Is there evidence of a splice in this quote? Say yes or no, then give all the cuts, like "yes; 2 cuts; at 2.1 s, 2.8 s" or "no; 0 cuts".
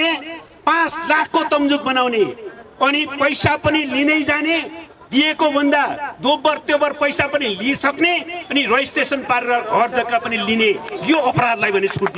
no; 0 cuts